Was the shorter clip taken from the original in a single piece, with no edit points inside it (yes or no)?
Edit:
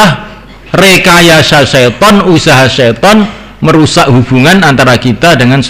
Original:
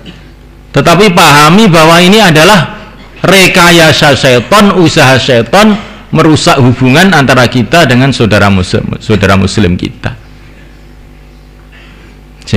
yes